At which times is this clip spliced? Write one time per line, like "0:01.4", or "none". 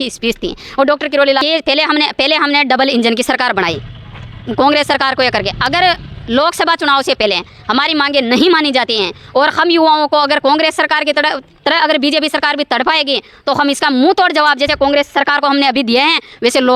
0:01.4